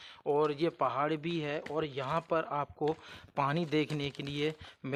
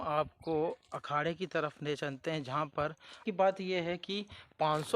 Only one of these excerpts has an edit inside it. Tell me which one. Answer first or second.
second